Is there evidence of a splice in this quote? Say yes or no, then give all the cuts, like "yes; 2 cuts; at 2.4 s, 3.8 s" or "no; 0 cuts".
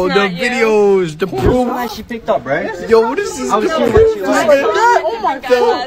no; 0 cuts